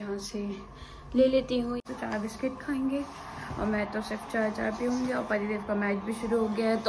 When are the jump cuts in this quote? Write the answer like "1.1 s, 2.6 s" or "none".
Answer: 1.8 s